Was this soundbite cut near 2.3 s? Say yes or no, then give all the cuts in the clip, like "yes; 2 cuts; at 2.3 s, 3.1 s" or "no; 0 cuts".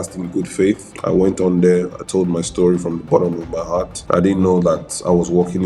no; 2 cuts; at 0.9 s, 3.9 s